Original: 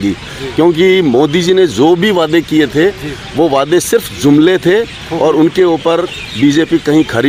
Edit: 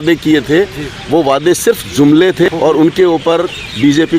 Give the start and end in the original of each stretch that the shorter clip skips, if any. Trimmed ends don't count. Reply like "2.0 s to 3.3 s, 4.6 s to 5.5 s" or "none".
4.7 s to 5.0 s